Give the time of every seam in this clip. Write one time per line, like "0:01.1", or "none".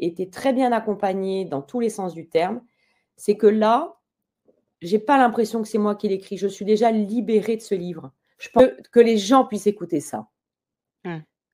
0:08.6